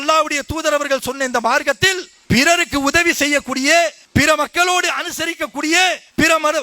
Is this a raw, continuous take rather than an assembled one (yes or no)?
no